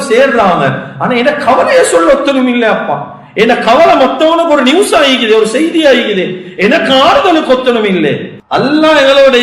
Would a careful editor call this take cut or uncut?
cut